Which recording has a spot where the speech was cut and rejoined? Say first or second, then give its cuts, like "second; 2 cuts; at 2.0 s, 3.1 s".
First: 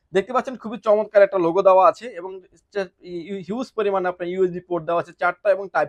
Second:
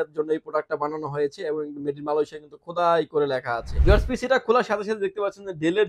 second; 1 cut; at 3.7 s